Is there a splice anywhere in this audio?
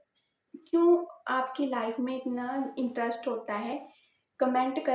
no; 0 cuts

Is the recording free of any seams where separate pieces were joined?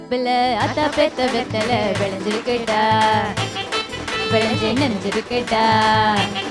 yes; 0 cuts

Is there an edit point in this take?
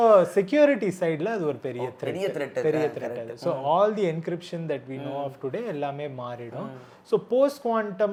no; 0 cuts

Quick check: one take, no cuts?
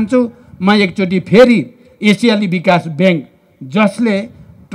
yes; 0 cuts

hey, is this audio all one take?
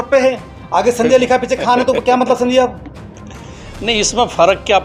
yes; 0 cuts

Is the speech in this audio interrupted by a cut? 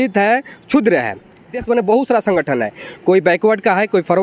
yes; 1 cut; at 1.5 s

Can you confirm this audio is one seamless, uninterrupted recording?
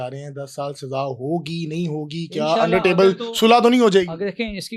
yes; 0 cuts

